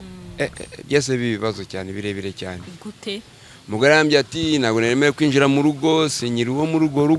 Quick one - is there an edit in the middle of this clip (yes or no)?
no